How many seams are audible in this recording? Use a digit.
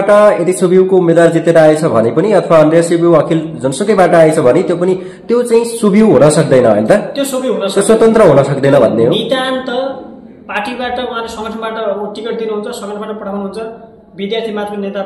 0